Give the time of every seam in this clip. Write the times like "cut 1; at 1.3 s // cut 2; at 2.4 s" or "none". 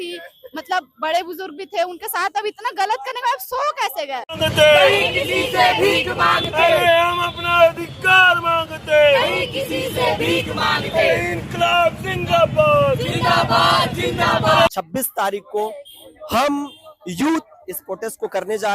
cut 1; at 4.4 s // cut 2; at 14.7 s